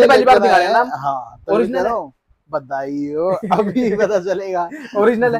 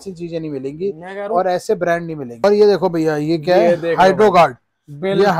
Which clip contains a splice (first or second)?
second